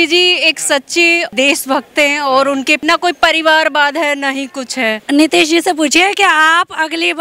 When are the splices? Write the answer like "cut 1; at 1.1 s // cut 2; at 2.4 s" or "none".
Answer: cut 1; at 1.3 s // cut 2; at 2.8 s // cut 3; at 5.0 s